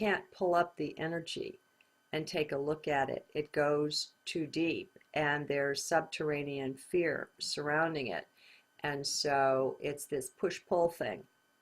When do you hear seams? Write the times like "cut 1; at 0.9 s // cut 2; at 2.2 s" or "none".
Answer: cut 1; at 7.5 s